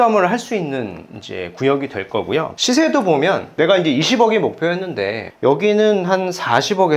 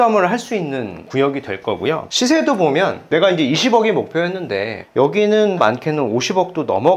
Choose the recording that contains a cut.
second; 2 cuts; at 1.0 s, 5.6 s

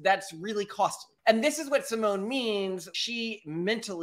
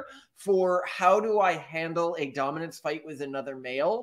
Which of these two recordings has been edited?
first; 2 cuts; at 1.2 s, 2.9 s

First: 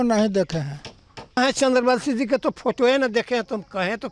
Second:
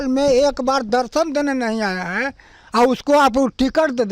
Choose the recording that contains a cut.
first; 1 cut; at 1.4 s

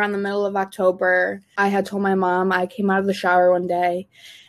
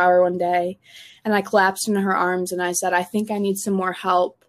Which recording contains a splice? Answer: first; 1 cut; at 1.4 s

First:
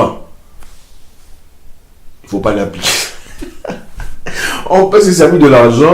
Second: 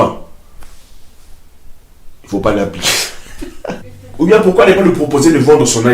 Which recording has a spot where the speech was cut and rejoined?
second; 1 cut; at 4.0 s

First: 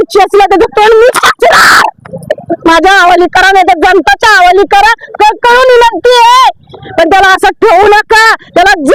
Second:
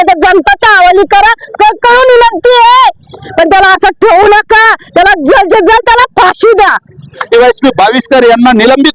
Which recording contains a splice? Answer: second; 1 cut; at 7.3 s

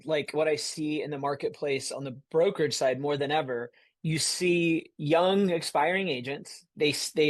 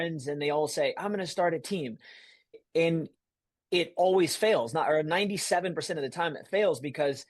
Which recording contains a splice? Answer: second; 1 cut; at 2.6 s

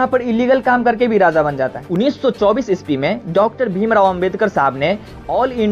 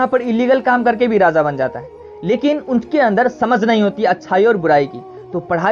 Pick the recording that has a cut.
first; 1 cut; at 1.8 s

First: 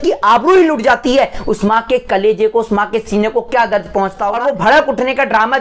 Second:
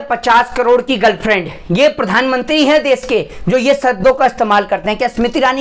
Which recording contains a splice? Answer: first; 1 cut; at 4.4 s

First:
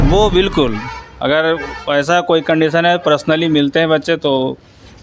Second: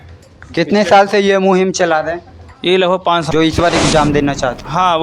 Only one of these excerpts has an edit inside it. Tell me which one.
second; 1 cut; at 3.3 s

